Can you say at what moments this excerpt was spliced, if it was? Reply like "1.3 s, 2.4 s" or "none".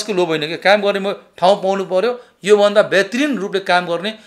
none